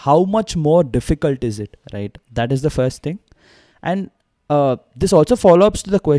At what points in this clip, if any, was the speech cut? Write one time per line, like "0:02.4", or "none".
none